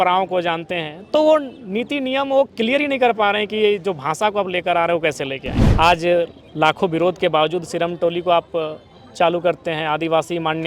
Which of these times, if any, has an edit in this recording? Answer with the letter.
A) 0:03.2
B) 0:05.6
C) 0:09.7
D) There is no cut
B